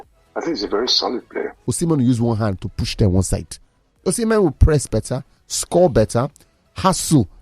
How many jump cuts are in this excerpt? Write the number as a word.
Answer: one